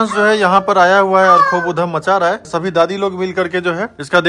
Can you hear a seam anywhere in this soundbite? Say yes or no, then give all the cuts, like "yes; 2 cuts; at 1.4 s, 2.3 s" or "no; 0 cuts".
no; 0 cuts